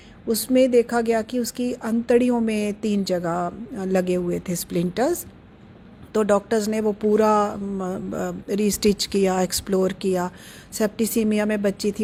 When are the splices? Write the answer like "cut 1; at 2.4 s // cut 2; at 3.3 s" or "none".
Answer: none